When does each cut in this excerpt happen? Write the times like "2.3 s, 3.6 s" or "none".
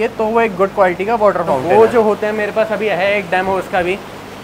1.6 s